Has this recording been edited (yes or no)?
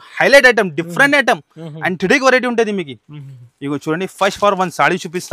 no